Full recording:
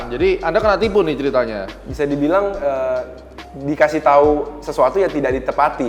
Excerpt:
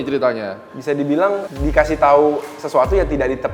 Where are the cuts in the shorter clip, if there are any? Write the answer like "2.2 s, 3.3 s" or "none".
1.4 s